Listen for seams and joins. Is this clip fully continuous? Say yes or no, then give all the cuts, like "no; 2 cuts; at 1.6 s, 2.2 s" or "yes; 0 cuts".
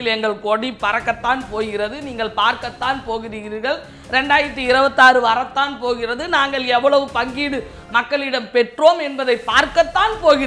yes; 0 cuts